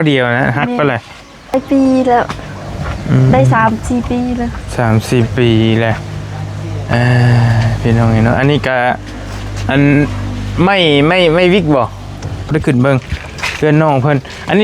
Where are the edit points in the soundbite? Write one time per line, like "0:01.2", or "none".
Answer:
0:01.5
0:12.5